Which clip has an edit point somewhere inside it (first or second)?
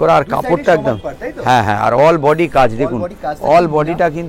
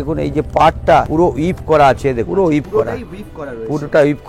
second